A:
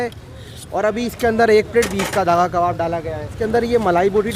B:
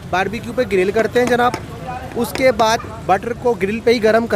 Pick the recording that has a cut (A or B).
A